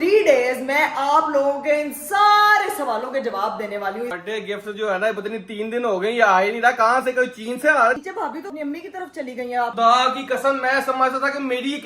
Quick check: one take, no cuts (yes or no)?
no